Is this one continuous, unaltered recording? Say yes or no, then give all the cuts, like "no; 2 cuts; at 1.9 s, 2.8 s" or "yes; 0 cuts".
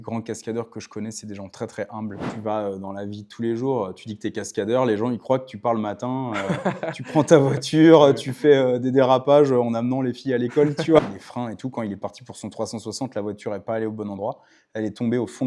no; 2 cuts; at 2.2 s, 11.0 s